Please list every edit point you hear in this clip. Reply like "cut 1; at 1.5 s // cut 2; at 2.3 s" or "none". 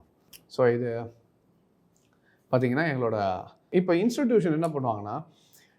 cut 1; at 3.6 s